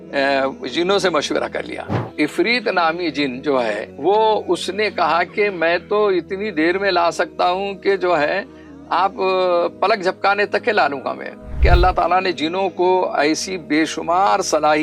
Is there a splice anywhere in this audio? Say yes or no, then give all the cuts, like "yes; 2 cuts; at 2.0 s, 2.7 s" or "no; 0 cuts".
yes; 3 cuts; at 2.0 s, 3.9 s, 11.6 s